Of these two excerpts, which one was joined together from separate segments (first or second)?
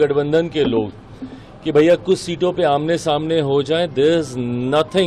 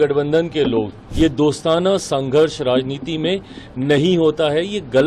second